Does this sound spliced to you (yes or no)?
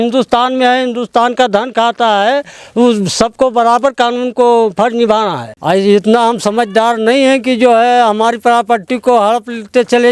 yes